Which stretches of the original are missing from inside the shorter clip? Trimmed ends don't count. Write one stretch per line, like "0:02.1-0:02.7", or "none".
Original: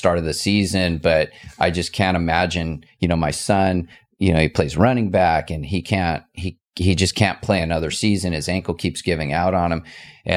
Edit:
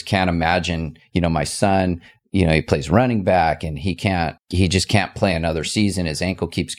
0:06.3-0:06.7